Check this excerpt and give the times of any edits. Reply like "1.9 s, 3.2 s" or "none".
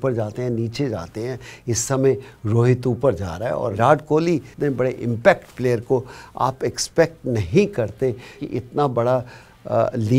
3.7 s, 4.5 s, 8.4 s